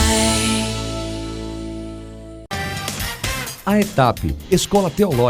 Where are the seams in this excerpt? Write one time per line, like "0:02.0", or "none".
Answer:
0:02.4